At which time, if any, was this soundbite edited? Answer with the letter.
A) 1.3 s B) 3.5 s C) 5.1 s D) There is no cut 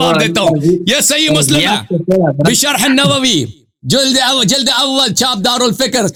D